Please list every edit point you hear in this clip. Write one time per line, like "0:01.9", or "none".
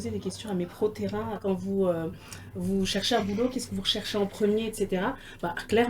0:01.4